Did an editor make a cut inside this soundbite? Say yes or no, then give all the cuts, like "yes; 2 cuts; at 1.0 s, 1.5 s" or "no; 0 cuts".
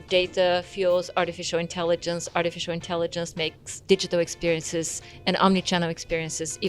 yes; 1 cut; at 3.7 s